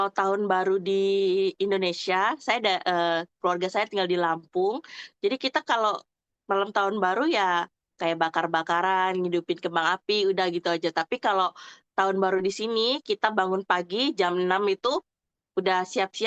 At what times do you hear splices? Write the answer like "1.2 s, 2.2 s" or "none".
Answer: none